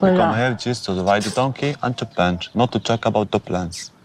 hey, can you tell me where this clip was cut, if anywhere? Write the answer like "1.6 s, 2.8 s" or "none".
none